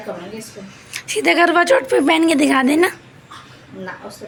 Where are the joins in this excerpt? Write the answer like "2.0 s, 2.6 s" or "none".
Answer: none

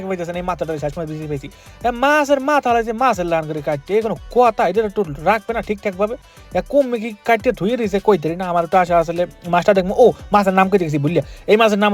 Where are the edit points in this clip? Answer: none

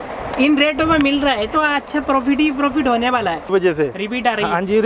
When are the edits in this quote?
3.4 s

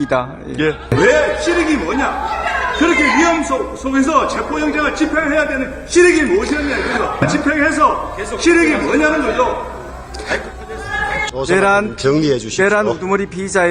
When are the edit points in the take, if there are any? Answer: 0.9 s, 7.2 s

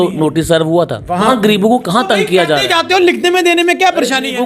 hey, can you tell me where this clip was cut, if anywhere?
1.3 s

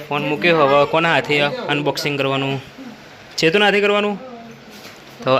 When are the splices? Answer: none

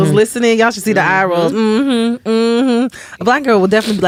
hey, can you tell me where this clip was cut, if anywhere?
none

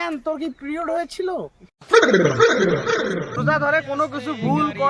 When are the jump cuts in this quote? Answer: 3.4 s

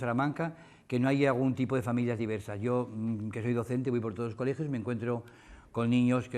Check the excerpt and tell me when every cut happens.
none

